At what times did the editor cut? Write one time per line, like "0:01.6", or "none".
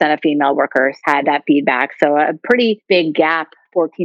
0:01.0
0:02.9